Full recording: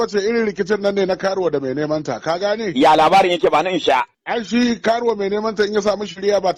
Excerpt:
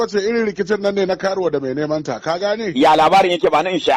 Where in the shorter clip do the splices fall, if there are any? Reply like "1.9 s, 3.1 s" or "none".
none